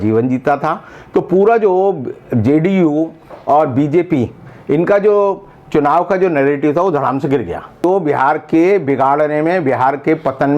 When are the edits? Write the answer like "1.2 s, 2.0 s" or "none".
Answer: 7.8 s